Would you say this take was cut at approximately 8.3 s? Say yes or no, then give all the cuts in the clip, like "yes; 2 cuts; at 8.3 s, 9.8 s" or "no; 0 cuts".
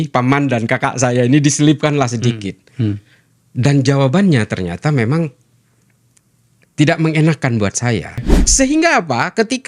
yes; 1 cut; at 8.3 s